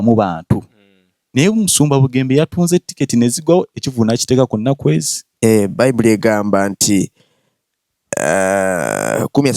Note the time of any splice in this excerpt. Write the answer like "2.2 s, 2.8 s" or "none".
5.2 s